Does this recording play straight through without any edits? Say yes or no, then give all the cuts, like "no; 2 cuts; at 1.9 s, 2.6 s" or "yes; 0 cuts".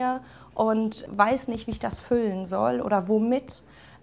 no; 1 cut; at 1.0 s